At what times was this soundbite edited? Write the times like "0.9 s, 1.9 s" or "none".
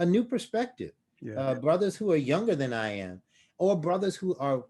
none